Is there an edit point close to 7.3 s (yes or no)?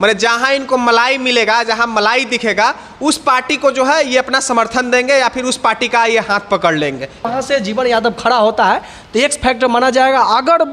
yes